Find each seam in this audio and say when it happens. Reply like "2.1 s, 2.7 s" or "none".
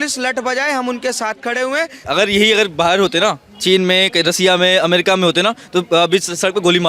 2.1 s